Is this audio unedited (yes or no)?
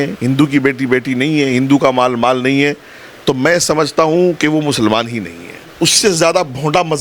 no